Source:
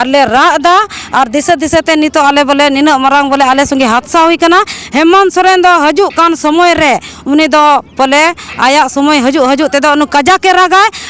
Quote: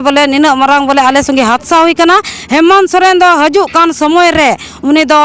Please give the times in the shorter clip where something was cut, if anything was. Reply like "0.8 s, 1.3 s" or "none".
none